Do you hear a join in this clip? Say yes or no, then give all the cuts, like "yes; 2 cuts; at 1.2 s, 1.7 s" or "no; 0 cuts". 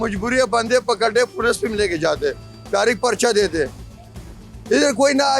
no; 0 cuts